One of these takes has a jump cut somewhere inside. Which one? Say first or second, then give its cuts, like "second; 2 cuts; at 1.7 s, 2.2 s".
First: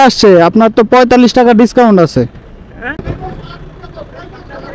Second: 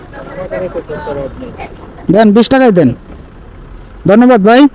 first; 1 cut; at 2.6 s